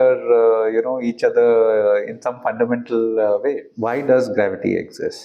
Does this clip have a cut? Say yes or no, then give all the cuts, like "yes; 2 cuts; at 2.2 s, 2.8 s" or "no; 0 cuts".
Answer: yes; 1 cut; at 3.7 s